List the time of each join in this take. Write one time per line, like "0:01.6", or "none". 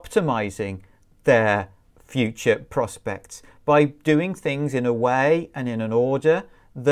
none